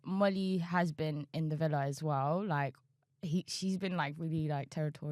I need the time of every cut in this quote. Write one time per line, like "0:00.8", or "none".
none